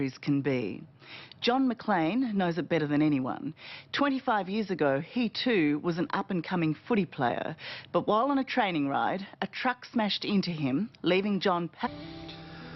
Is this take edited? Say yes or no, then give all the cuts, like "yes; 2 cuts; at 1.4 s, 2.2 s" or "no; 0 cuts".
no; 0 cuts